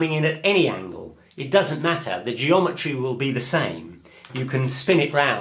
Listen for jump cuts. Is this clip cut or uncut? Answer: cut